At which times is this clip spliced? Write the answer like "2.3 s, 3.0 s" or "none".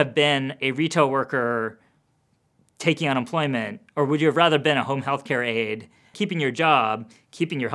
6.1 s